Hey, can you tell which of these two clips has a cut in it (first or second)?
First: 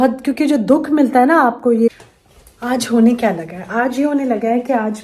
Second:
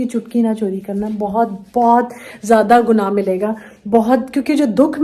first